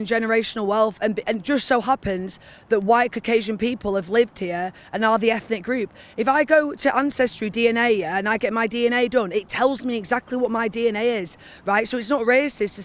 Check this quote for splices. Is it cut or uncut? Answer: uncut